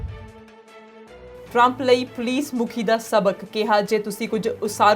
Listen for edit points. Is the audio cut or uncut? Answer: cut